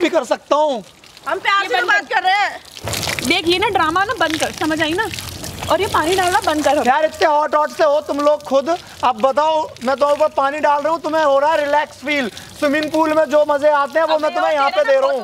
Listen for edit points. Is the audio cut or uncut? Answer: uncut